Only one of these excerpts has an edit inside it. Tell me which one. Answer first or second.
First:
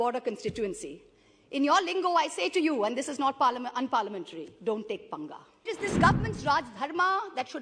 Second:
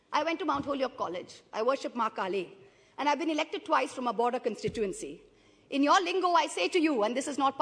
first